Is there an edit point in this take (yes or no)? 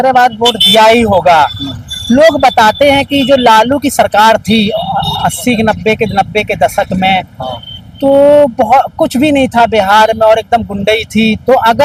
no